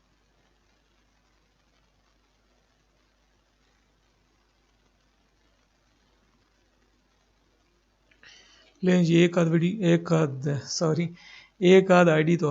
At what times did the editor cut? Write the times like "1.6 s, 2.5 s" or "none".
4.9 s